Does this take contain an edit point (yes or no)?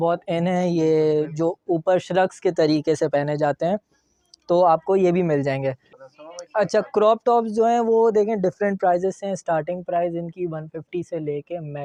no